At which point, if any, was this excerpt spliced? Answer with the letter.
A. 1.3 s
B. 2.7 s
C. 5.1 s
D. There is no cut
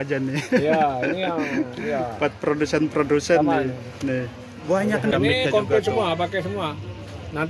C